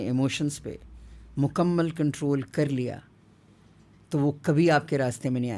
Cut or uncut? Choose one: uncut